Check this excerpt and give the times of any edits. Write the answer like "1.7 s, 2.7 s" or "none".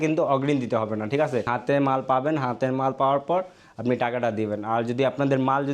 1.5 s